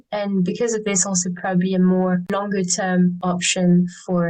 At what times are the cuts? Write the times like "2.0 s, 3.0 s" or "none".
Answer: 2.3 s, 3.2 s